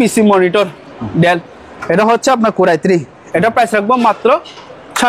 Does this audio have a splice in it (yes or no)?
no